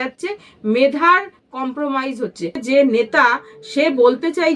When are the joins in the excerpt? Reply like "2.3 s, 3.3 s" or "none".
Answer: 2.6 s